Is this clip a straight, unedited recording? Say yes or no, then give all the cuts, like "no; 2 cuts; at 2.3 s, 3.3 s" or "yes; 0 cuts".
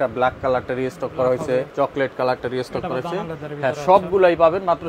yes; 0 cuts